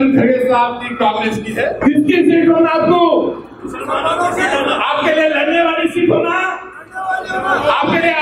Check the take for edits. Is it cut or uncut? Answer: cut